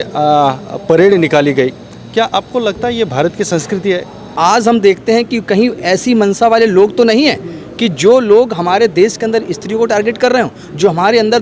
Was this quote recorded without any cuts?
no; 1 cut; at 4.3 s

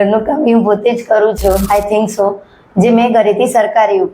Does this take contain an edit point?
yes; 1 cut; at 1.6 s

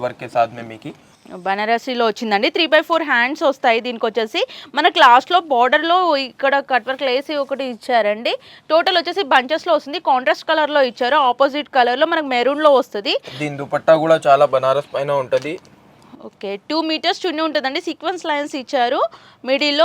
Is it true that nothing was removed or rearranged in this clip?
yes; 0 cuts

